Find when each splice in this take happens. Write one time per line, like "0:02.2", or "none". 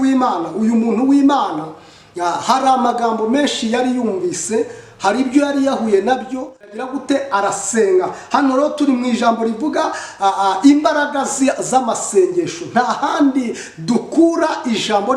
0:06.8

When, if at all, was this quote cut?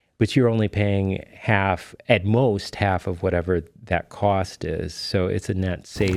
none

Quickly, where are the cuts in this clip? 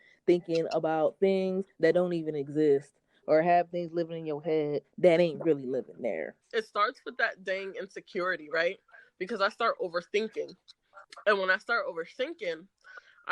0:06.3

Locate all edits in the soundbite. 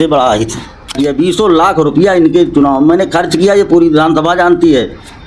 0:00.9

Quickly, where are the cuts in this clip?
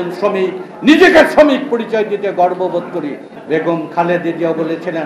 0:03.3

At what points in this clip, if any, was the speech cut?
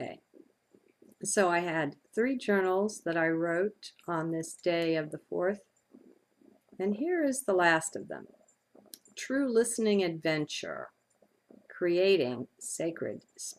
none

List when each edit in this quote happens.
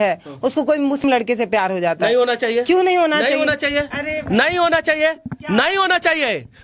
0:01.0

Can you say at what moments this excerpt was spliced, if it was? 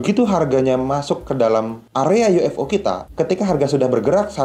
0:01.8
0:03.3

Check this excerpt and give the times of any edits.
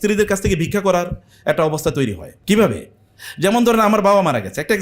0:02.3

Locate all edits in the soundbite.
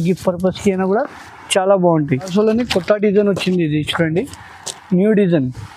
0:02.3

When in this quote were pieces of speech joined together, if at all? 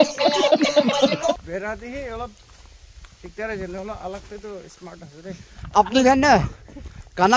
0:01.2
0:05.7

